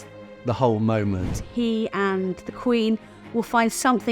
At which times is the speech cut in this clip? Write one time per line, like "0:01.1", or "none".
0:01.4